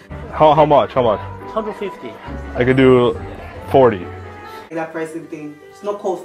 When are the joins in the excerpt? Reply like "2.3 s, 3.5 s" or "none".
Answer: 4.7 s